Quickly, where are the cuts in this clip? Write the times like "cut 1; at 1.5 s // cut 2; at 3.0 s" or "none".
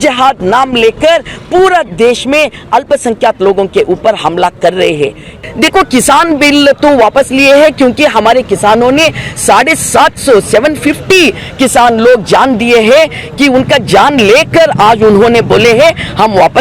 cut 1; at 5.3 s